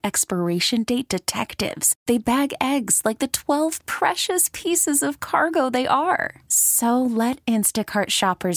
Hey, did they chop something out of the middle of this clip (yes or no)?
no